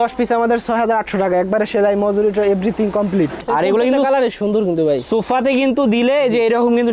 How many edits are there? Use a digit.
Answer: 1